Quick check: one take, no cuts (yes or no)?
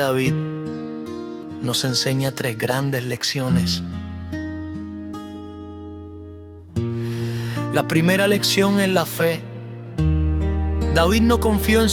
yes